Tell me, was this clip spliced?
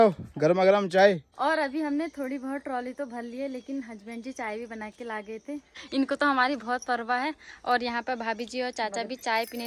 no; 0 cuts

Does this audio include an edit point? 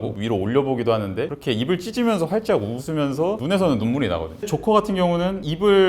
yes; 1 cut; at 4.4 s

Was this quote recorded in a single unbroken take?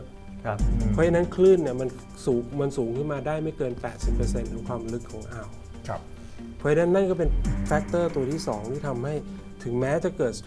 yes; 0 cuts

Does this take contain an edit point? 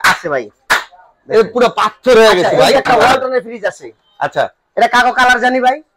yes; 1 cut; at 2.6 s

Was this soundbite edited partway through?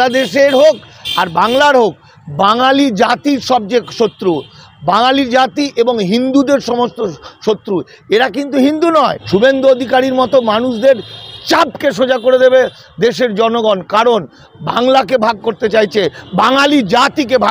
yes; 1 cut; at 9.2 s

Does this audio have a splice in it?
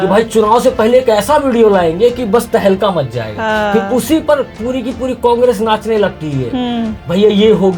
no; 0 cuts

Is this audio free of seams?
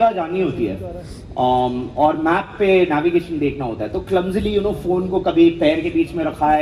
yes; 0 cuts

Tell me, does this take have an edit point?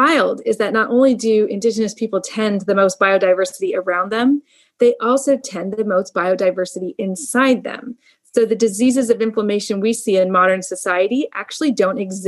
no; 0 cuts

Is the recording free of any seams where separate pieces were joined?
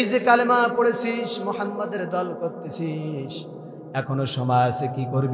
yes; 0 cuts

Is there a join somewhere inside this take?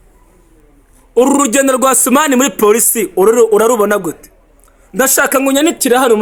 no; 0 cuts

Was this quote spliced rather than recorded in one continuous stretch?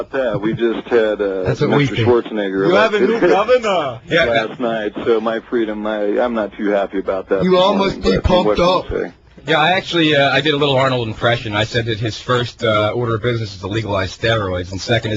yes; 1 cut; at 2.1 s

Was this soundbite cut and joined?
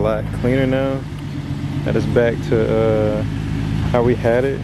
no; 0 cuts

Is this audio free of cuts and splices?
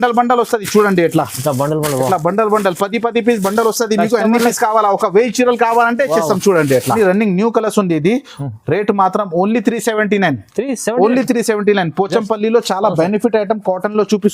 no; 1 cut; at 7.0 s

